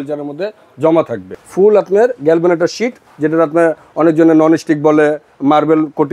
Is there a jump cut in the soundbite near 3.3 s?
no; 1 cut; at 1.4 s

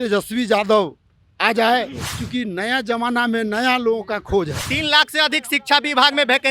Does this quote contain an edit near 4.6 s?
yes; 1 cut; at 4.6 s

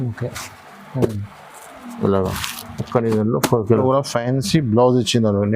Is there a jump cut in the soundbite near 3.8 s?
yes; 1 cut; at 3.8 s

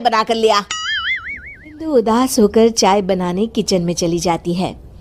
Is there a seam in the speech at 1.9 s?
yes; 1 cut; at 1.9 s

